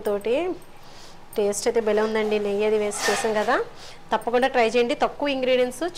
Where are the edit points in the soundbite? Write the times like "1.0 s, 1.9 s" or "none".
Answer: none